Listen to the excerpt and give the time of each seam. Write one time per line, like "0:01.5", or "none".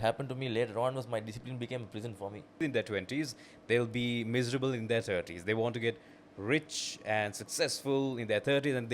0:02.6